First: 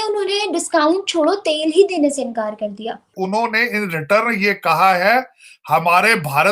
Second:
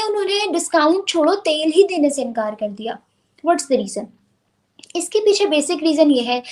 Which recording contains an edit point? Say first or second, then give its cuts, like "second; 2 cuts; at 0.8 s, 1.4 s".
first; 1 cut; at 3.1 s